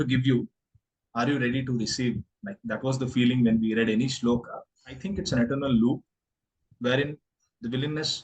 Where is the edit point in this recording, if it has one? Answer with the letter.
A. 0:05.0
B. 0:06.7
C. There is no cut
A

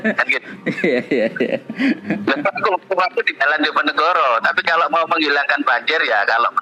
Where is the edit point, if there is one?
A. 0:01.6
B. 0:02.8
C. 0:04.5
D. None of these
D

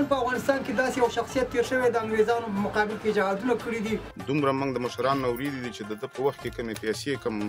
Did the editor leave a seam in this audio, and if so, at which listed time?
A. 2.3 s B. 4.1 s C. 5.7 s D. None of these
B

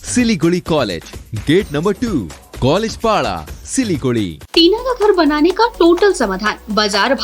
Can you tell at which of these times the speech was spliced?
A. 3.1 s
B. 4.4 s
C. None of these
B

